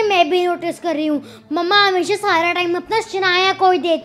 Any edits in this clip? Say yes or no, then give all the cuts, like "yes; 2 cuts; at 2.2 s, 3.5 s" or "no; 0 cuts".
no; 0 cuts